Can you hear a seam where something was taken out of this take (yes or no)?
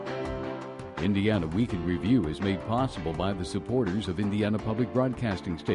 yes